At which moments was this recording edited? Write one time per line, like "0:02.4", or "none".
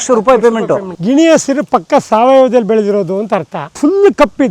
0:00.9
0:03.7